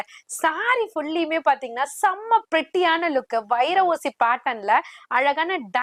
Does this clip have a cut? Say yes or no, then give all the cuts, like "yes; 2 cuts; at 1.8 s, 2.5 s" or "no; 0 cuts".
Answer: no; 0 cuts